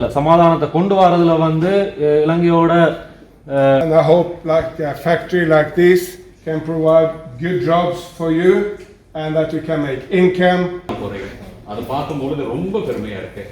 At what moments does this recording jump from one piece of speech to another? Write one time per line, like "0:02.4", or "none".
0:03.8
0:10.9